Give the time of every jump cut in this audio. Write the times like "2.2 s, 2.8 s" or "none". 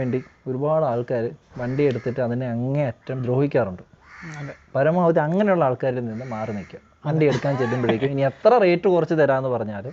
none